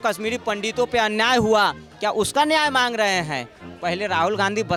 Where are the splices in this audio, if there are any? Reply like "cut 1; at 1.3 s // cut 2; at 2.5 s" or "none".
none